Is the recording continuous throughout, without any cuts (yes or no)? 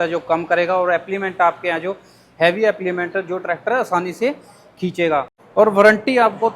no